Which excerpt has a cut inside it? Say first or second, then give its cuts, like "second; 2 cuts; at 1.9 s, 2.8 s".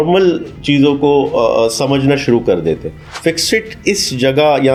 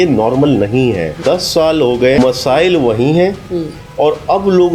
second; 2 cuts; at 1.2 s, 2.2 s